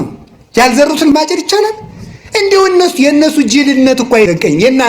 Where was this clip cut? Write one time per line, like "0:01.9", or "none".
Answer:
0:01.1